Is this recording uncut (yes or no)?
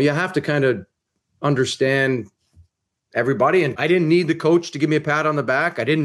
no